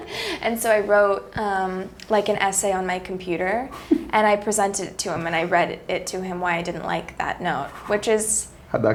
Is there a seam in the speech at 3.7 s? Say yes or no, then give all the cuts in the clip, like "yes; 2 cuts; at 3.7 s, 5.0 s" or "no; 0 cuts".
no; 0 cuts